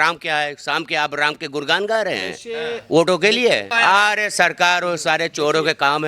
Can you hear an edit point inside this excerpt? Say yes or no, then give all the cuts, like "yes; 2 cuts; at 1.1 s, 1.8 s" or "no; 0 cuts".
yes; 1 cut; at 3.7 s